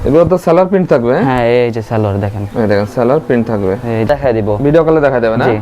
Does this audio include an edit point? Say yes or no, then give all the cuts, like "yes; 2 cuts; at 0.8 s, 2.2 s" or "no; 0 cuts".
yes; 1 cut; at 4.1 s